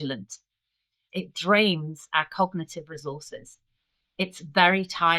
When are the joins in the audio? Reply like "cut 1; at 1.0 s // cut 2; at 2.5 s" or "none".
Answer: cut 1; at 1.0 s